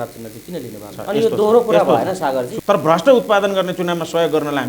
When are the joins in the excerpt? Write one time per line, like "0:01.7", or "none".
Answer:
0:01.0
0:02.5